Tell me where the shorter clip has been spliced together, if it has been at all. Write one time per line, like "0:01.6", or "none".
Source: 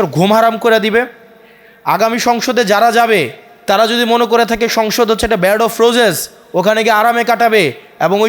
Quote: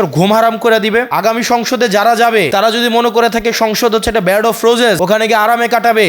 0:01.1
0:02.5
0:05.0